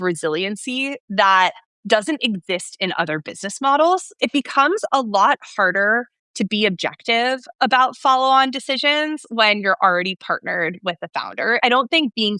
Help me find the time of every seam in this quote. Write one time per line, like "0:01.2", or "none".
0:04.1
0:11.6